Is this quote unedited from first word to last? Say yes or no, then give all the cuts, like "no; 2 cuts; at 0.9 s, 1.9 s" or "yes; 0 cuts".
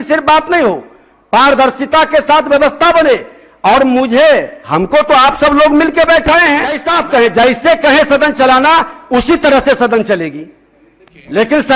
no; 1 cut; at 6.8 s